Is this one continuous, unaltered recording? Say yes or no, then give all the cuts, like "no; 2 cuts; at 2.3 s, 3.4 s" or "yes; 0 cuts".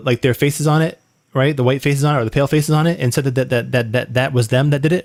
yes; 0 cuts